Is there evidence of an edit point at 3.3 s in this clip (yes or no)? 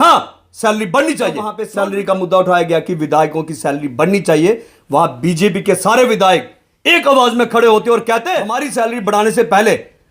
no